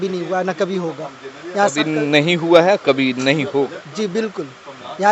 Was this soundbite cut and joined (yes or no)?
no